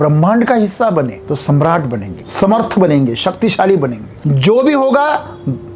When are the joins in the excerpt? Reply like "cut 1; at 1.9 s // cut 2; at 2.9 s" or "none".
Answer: cut 1; at 1.2 s // cut 2; at 2.2 s // cut 3; at 4.1 s